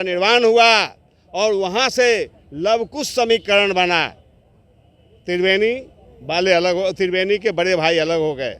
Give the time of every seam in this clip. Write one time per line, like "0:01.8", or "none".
none

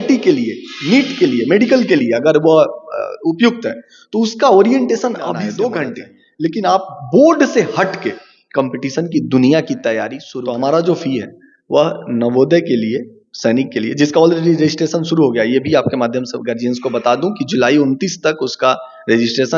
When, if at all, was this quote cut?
0:05.5
0:10.2

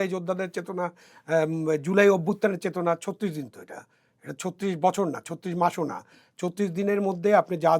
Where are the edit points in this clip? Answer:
none

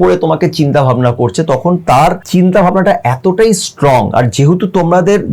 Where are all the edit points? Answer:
0:02.2

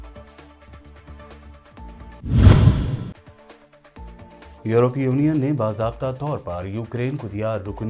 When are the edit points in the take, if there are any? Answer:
0:01.8

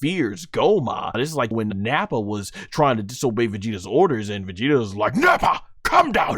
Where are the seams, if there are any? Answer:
0:01.5

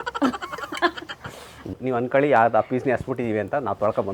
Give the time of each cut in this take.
0:01.7

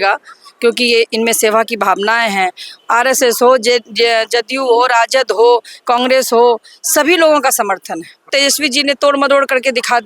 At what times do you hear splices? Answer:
0:02.7
0:08.3

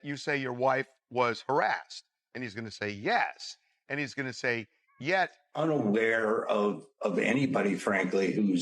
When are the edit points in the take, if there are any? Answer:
0:05.4

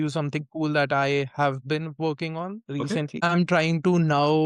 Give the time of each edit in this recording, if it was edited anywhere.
0:03.1

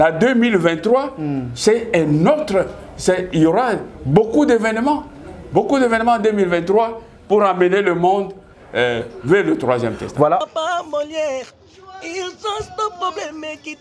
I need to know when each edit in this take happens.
0:10.4

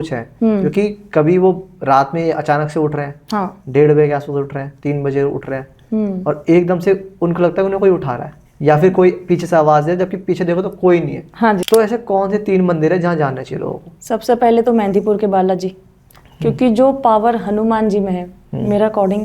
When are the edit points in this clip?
0:11.6

